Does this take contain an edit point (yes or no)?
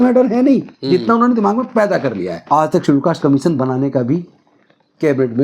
yes